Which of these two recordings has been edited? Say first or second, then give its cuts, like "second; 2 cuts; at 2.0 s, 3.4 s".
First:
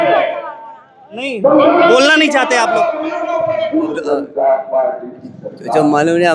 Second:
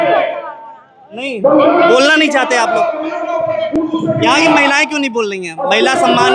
first; 1 cut; at 3.8 s